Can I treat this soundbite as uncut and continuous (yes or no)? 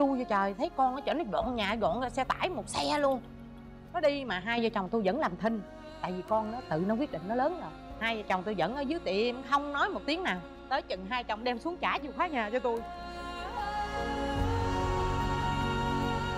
yes